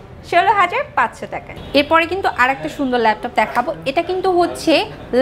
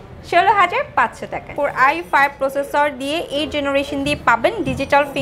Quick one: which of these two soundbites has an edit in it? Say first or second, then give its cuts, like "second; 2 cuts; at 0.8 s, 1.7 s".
second; 1 cut; at 1.5 s